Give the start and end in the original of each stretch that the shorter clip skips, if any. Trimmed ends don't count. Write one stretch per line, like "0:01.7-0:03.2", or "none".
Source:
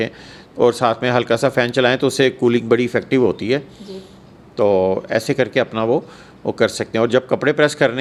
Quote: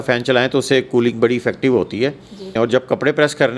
0:03.9-0:06.8